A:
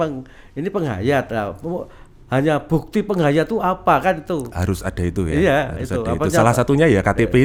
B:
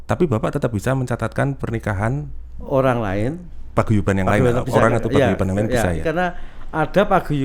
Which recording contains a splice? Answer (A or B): B